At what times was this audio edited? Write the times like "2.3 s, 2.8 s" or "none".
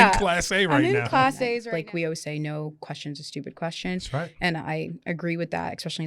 1.7 s